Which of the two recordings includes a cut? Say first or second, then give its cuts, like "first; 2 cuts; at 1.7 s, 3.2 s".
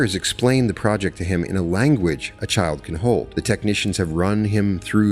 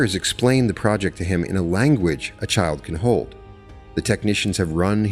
first; 1 cut; at 3.3 s